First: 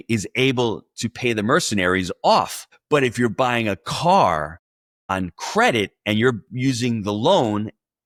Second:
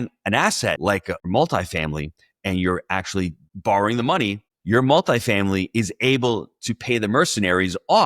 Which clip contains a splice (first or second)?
second